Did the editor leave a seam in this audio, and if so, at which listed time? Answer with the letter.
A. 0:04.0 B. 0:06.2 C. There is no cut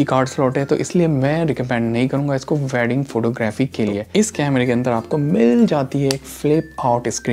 A